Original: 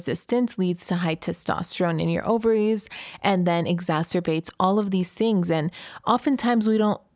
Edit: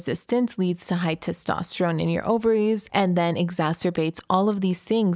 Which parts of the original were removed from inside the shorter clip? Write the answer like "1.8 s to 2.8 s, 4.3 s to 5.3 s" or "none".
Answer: 2.8 s to 3.1 s